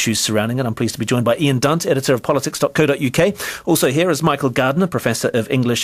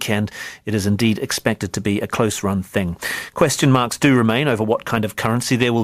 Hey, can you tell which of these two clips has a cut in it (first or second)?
first